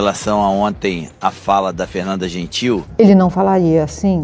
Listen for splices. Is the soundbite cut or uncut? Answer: cut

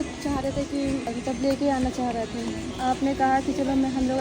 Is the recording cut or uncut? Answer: cut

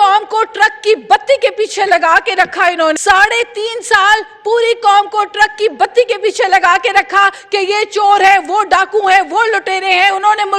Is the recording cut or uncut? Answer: cut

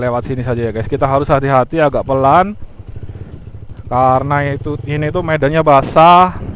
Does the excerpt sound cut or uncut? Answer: uncut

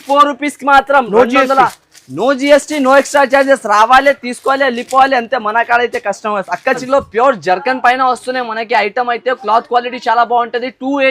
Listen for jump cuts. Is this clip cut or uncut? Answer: cut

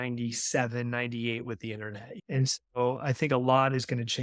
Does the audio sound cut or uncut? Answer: cut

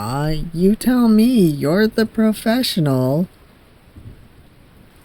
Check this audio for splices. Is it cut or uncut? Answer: uncut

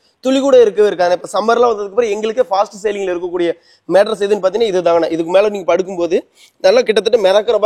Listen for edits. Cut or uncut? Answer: uncut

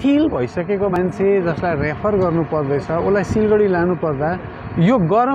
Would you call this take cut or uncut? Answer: cut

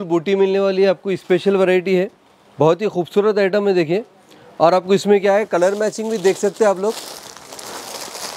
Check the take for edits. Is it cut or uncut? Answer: uncut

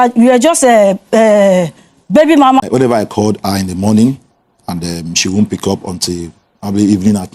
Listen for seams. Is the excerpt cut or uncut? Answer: cut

